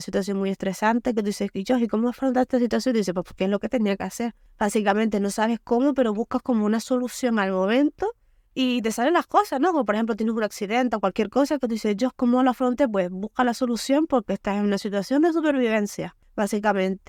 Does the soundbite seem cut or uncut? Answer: uncut